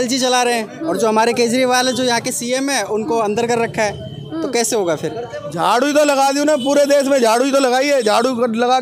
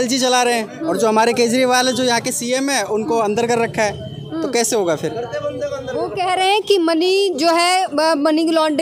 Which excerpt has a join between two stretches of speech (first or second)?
first